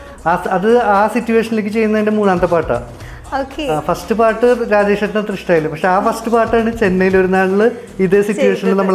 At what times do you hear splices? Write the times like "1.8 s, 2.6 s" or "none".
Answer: none